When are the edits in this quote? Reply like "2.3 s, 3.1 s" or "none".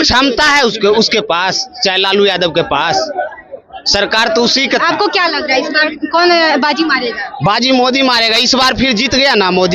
none